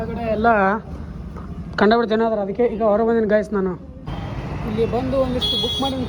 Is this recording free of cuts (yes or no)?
no